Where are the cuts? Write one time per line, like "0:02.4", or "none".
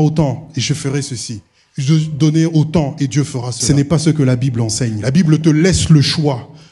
0:03.6
0:05.0